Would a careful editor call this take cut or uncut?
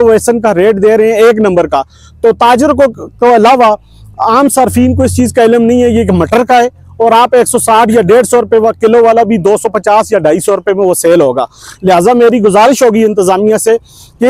uncut